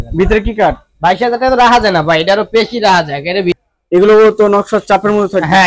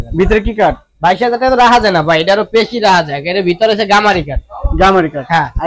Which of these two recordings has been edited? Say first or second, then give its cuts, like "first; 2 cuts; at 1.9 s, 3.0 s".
first; 1 cut; at 3.6 s